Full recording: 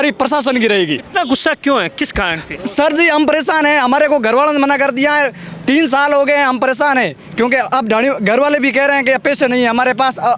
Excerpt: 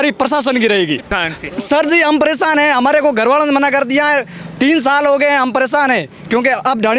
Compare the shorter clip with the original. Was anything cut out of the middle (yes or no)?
yes